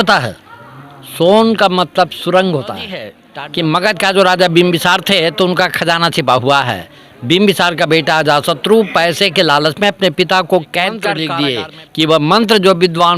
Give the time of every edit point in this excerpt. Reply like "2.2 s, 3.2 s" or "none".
3.2 s, 11.2 s